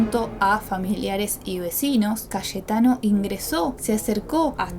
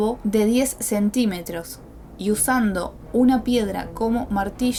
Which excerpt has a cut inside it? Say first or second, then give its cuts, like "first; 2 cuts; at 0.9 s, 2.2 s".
first; 2 cuts; at 2.2 s, 3.8 s